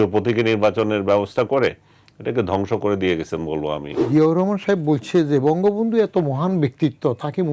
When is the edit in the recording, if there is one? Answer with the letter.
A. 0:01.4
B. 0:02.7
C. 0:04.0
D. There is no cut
C